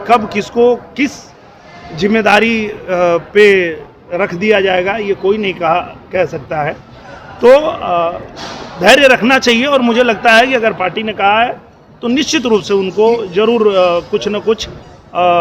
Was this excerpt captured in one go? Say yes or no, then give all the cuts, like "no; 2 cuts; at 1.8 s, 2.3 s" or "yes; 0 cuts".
yes; 0 cuts